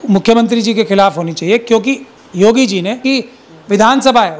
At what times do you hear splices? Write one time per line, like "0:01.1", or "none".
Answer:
0:03.0